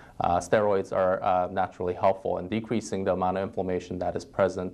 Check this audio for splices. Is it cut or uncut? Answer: uncut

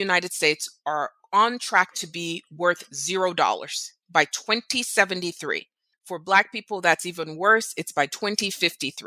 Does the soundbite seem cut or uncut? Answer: uncut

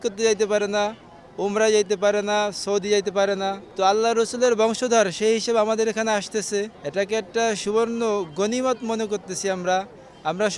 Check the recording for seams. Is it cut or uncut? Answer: uncut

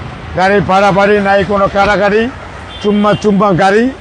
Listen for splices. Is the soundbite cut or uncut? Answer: uncut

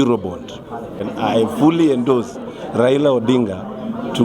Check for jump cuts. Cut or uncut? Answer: cut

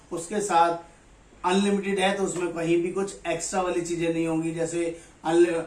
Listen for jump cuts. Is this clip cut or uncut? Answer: uncut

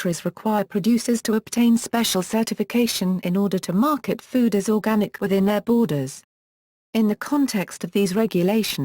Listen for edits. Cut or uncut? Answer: cut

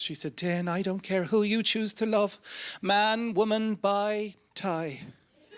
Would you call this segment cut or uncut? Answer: uncut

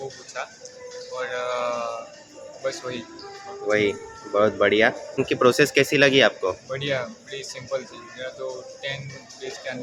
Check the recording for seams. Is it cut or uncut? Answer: uncut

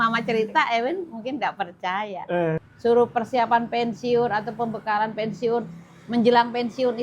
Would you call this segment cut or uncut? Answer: cut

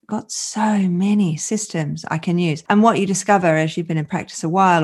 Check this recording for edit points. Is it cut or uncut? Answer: cut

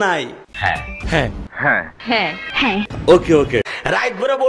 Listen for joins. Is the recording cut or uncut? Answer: uncut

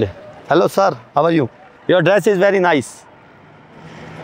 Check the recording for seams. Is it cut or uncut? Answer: uncut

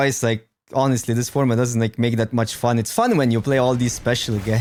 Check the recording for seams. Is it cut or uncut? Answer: uncut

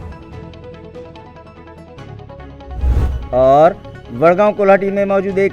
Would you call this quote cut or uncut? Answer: uncut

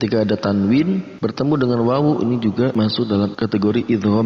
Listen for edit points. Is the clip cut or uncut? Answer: cut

